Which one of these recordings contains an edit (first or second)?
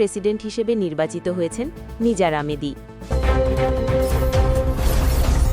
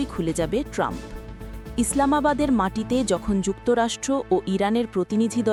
first